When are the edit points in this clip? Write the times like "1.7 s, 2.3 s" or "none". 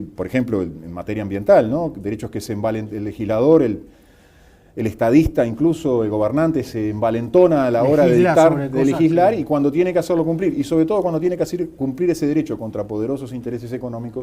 2.2 s